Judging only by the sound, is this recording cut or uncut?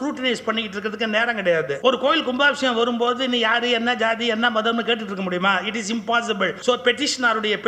cut